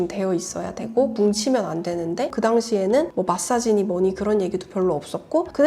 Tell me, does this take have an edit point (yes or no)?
yes